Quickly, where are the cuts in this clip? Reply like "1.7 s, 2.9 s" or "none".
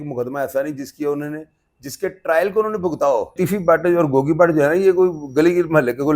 3.4 s